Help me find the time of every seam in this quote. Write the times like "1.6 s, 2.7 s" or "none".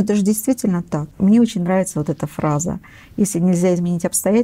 1.0 s